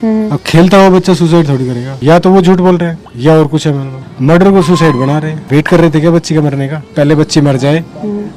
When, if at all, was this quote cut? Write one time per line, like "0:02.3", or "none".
0:01.9
0:03.9
0:05.4